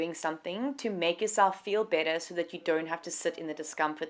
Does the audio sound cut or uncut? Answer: uncut